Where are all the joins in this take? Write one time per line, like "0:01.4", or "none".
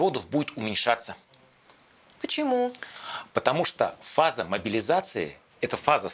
none